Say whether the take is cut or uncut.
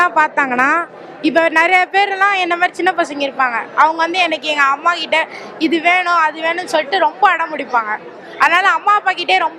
uncut